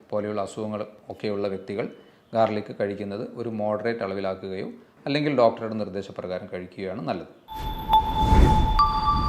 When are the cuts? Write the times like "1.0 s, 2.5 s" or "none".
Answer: 7.4 s